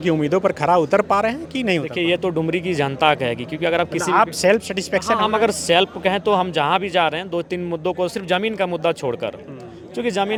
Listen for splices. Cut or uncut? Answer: uncut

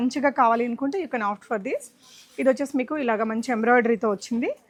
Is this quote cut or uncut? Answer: uncut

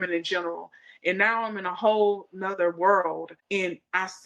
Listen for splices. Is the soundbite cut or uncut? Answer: cut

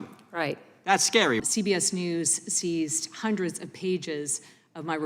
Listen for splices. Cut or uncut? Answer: cut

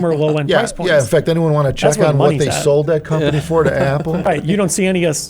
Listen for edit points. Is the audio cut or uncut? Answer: cut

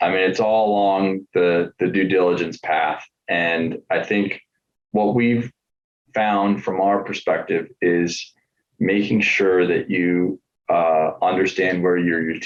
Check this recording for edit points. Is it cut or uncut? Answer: uncut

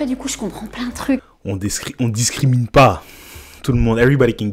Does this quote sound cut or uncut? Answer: uncut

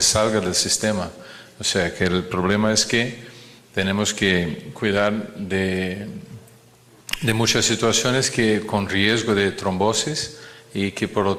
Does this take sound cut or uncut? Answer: uncut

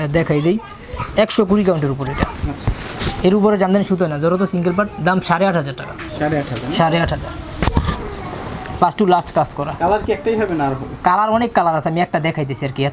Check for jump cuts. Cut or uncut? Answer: uncut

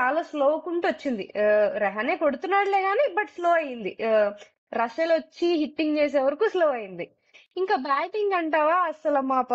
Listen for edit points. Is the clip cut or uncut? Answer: cut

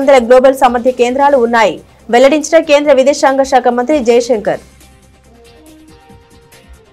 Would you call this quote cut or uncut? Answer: uncut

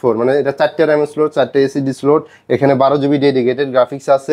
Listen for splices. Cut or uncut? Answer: uncut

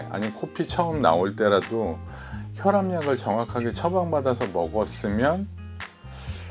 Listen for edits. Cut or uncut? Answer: uncut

